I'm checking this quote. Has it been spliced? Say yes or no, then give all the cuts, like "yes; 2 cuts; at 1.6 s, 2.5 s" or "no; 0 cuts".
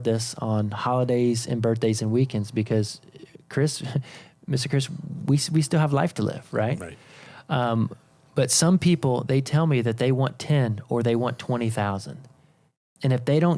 no; 0 cuts